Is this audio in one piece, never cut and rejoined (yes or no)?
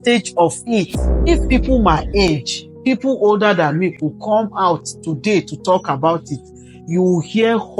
no